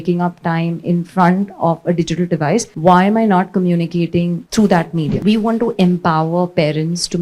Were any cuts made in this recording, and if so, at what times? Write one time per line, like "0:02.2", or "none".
0:02.7
0:04.4
0:05.1